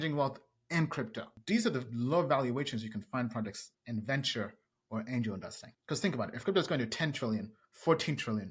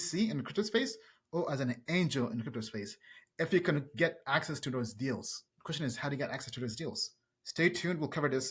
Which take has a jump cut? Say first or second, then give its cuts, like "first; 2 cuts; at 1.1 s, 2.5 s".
first; 1 cut; at 1.3 s